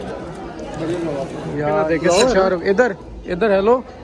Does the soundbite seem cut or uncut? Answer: cut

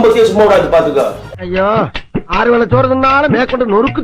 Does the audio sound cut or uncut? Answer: uncut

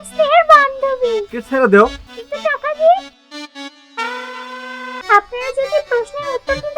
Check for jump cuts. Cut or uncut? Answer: cut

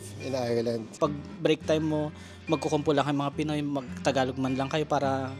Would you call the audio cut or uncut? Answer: cut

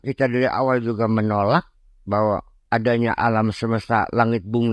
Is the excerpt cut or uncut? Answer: uncut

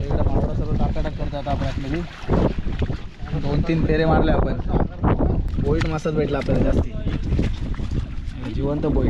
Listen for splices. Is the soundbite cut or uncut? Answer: cut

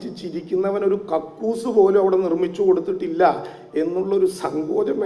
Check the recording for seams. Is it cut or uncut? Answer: uncut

